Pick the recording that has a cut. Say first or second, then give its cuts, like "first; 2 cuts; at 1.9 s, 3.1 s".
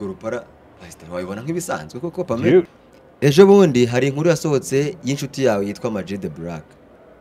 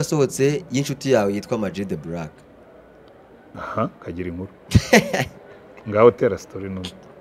first; 1 cut; at 2.7 s